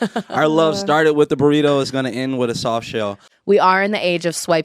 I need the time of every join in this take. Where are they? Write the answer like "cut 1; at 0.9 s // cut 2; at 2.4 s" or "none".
cut 1; at 3.3 s